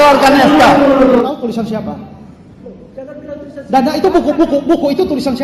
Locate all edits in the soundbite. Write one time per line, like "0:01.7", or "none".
0:01.3